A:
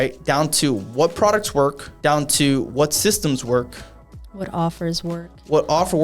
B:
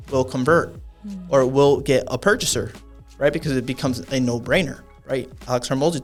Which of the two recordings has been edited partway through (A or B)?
A